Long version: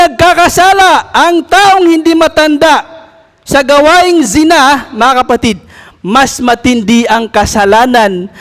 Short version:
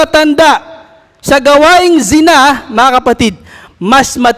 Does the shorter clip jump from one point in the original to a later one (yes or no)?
no